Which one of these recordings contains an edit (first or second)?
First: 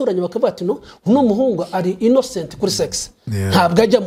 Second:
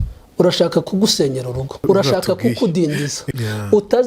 second